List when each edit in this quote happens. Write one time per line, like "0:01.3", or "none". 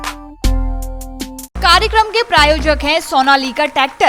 0:01.5